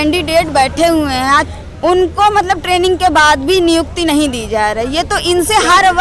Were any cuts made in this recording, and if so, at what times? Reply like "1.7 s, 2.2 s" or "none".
1.5 s